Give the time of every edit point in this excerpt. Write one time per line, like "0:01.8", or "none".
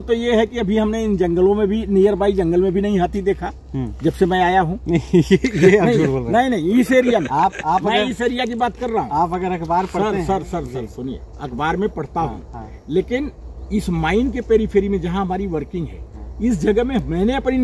none